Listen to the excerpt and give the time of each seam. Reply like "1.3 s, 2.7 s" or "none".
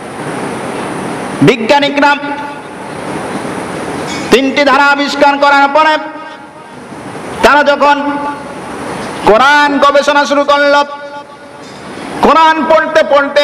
none